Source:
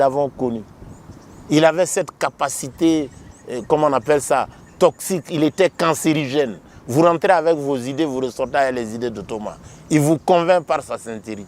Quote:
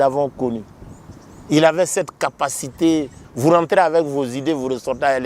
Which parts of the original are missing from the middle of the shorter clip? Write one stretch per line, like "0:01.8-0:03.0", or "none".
0:03.2-0:06.7